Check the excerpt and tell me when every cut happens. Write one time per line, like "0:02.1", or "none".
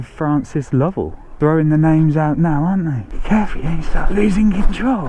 0:01.2
0:03.1